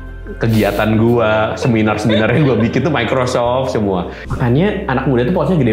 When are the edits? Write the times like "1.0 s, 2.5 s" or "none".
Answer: 4.2 s